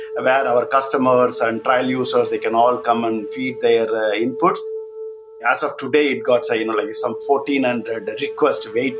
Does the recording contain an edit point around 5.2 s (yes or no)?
yes